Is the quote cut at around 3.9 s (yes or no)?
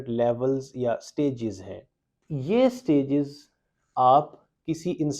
no